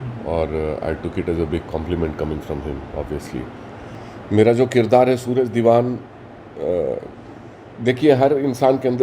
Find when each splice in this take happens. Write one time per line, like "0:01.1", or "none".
0:03.9